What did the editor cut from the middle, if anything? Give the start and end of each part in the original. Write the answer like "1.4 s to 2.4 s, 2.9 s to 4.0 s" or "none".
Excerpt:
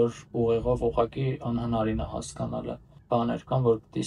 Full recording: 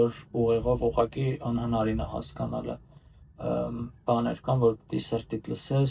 2.9 s to 3.9 s